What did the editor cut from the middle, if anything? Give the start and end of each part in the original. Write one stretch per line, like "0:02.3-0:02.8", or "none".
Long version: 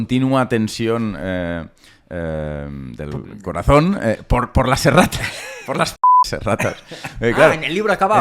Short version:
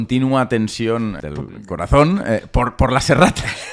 0:01.2-0:02.9